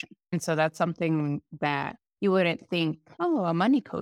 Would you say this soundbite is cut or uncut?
cut